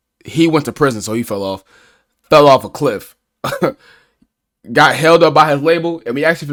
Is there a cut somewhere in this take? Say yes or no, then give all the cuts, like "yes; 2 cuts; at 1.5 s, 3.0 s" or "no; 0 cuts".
no; 0 cuts